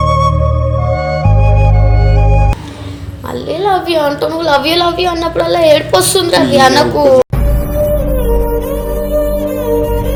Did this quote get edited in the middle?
no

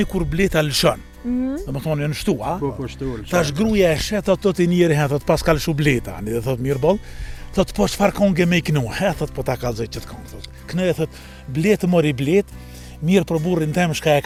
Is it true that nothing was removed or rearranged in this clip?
yes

